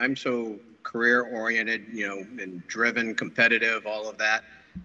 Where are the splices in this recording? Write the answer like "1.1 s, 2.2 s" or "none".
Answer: none